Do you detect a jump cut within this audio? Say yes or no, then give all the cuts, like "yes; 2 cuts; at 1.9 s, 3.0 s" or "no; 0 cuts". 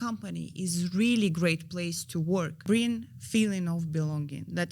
yes; 1 cut; at 2.6 s